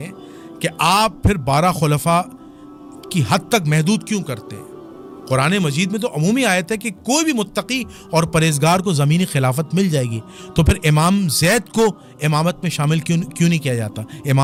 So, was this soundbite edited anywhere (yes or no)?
no